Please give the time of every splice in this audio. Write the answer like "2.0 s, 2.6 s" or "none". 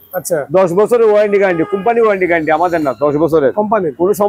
none